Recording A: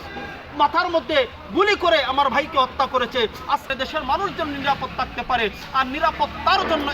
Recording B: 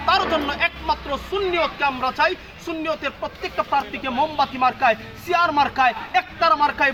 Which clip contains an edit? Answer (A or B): A